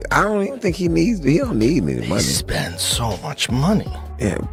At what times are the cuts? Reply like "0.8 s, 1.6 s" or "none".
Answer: none